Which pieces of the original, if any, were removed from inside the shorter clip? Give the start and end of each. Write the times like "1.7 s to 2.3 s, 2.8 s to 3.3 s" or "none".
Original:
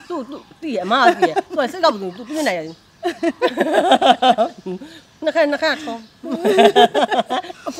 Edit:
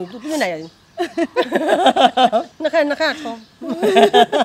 4.6 s to 5.1 s